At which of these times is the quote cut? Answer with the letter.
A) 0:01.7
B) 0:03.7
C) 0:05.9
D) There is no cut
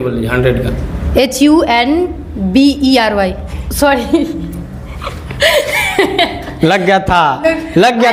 D